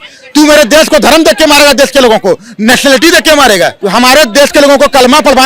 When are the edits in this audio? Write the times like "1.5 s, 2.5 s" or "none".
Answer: 3.8 s